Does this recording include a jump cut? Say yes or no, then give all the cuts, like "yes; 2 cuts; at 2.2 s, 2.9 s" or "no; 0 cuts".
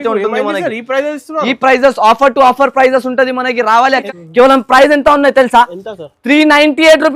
yes; 1 cut; at 4.1 s